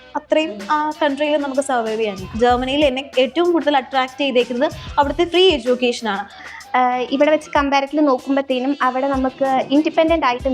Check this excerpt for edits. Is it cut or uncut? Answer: cut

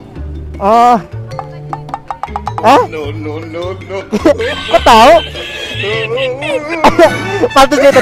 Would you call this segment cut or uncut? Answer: uncut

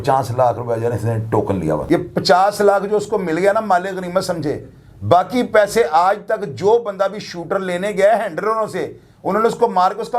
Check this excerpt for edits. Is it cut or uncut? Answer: cut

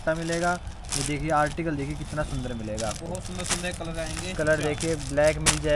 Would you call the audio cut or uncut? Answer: uncut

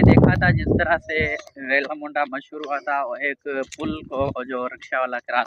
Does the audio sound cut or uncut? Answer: uncut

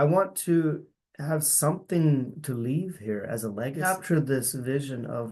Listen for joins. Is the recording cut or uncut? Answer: cut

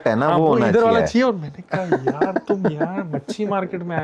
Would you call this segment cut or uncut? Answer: uncut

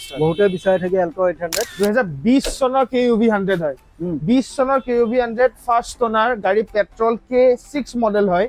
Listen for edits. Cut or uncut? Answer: cut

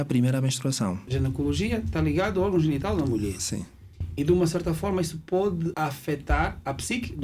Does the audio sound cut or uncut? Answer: cut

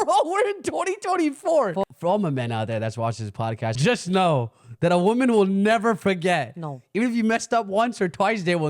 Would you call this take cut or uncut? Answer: cut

